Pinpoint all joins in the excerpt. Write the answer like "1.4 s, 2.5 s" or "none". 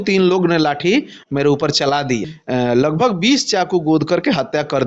2.4 s